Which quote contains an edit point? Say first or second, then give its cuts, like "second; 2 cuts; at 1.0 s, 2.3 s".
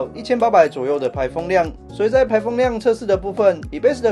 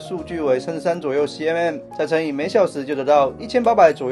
first; 1 cut; at 1.8 s